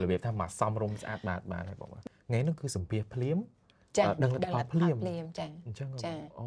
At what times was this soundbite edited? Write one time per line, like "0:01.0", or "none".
0:02.0